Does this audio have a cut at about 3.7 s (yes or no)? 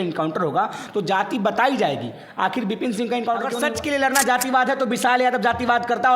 yes